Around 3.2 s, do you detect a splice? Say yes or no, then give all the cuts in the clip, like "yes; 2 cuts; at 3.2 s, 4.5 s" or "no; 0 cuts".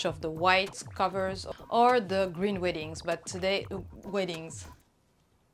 no; 1 cut; at 1.4 s